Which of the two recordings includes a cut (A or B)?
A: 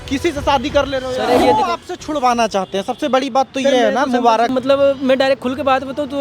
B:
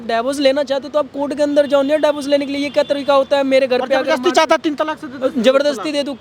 A